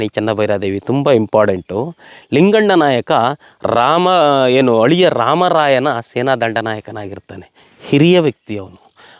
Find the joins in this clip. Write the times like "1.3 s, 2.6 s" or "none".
none